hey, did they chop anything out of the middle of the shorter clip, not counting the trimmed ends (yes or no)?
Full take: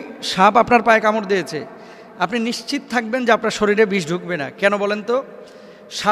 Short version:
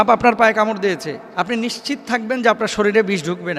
yes